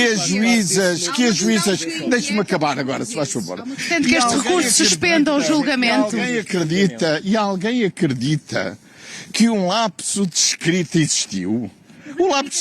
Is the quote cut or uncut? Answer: cut